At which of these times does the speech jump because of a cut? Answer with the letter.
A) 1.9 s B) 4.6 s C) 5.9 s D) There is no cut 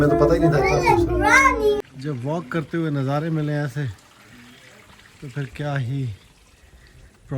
A